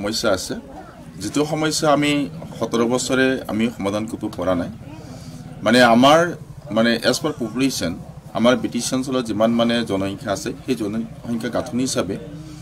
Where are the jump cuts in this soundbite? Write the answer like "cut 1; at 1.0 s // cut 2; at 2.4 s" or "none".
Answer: none